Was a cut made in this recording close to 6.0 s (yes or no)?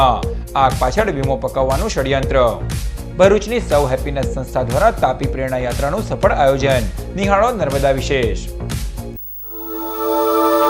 no